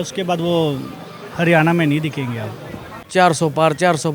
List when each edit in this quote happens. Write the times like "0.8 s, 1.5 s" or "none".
3.0 s